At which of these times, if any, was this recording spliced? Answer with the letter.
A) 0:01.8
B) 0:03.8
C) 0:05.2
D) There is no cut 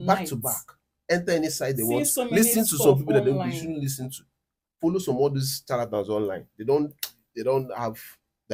D